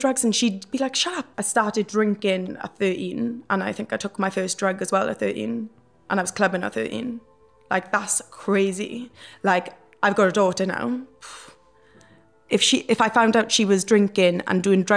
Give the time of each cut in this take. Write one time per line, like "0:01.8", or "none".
0:01.4